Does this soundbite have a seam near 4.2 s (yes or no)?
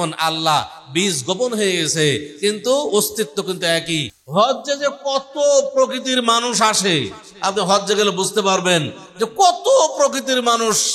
yes